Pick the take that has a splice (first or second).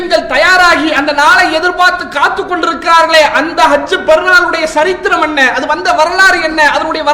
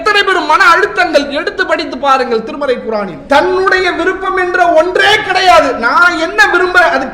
second